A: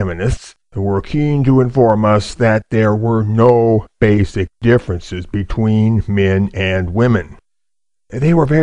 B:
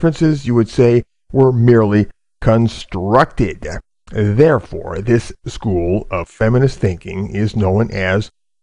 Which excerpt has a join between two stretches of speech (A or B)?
B